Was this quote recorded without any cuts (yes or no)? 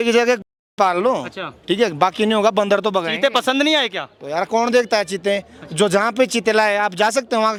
yes